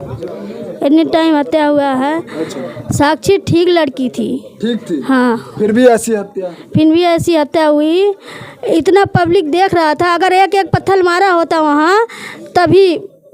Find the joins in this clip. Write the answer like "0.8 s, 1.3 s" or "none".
none